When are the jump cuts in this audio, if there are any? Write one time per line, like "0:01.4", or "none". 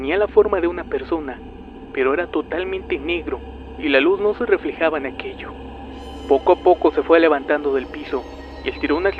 0:01.7

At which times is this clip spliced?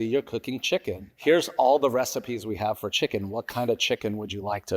0:01.0

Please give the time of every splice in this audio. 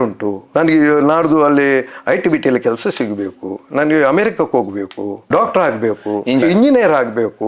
0:05.2
0:06.4

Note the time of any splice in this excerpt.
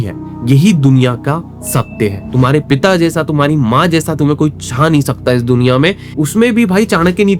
0:02.2
0:06.0

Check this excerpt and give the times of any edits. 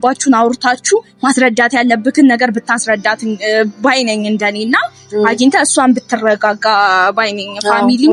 none

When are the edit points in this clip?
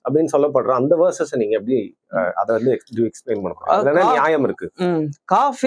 none

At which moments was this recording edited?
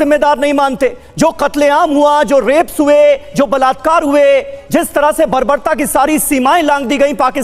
none

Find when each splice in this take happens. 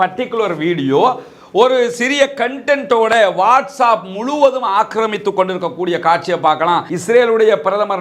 0:06.9

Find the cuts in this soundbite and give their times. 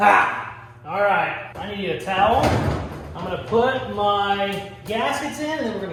none

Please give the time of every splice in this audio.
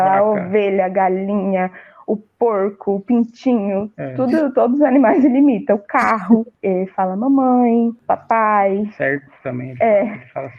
0:06.5
0:08.0

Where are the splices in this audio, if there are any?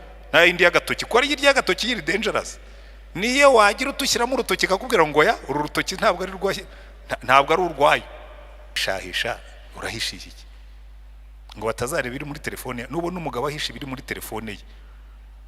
0:08.8

